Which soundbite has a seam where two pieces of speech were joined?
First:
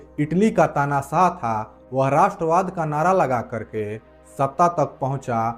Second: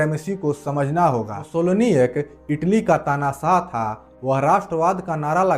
second; 1 cut; at 1.4 s

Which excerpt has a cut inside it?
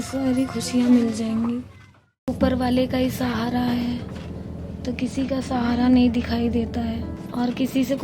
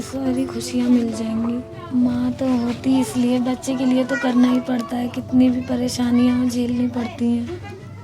first; 2 cuts; at 1.9 s, 7.0 s

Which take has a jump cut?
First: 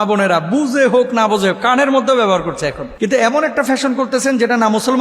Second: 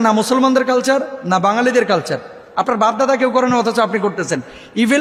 first; 1 cut; at 2.8 s

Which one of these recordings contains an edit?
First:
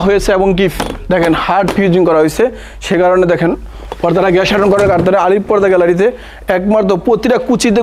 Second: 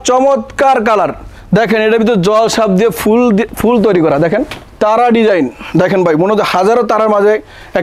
second; 1 cut; at 4.5 s

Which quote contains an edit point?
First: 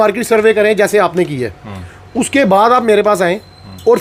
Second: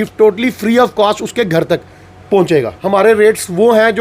second; 1 cut; at 2.8 s

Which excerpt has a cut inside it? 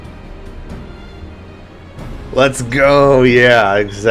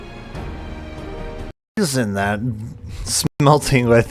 second; 2 cuts; at 1.6 s, 3.3 s

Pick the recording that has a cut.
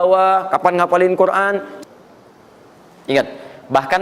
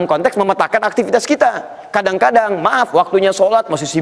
first; 1 cut; at 1.7 s

